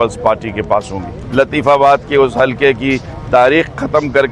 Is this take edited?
yes; 1 cut; at 1.1 s

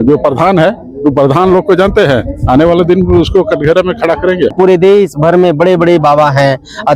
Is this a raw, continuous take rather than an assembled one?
no; 1 cut; at 4.5 s

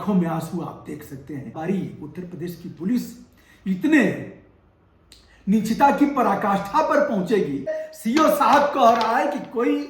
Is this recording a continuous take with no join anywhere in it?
no; 2 cuts; at 1.5 s, 7.9 s

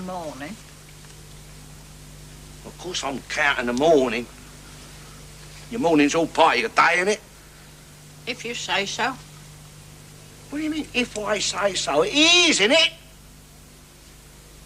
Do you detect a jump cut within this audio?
no; 0 cuts

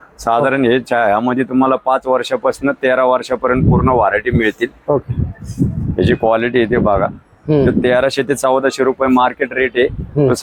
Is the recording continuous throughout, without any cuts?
yes; 0 cuts

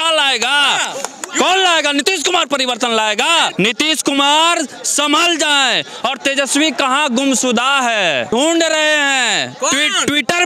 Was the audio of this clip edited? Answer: yes; 2 cuts; at 3.5 s, 8.3 s

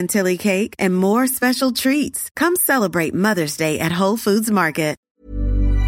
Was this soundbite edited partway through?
yes; 1 cut; at 5.0 s

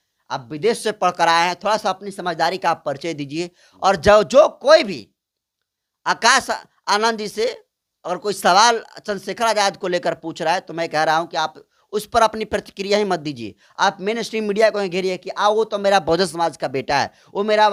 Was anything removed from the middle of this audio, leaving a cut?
no; 0 cuts

